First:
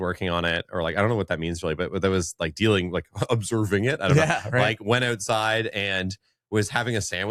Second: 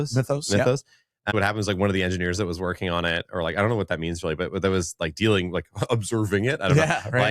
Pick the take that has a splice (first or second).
second